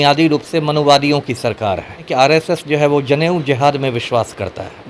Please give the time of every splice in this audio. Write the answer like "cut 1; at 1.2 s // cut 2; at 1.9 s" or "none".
cut 1; at 2.1 s